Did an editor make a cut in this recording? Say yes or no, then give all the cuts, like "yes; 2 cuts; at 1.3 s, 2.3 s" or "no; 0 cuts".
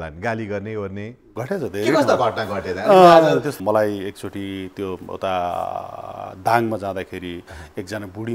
yes; 1 cut; at 3.6 s